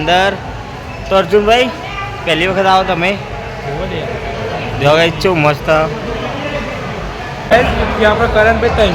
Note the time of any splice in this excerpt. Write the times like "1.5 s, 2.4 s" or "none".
7.4 s